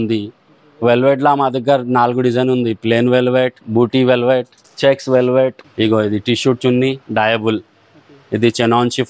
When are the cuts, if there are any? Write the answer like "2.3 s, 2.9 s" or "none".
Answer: 3.6 s, 4.6 s, 5.6 s